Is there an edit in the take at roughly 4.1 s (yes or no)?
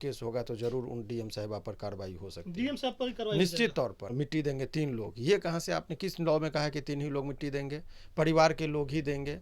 yes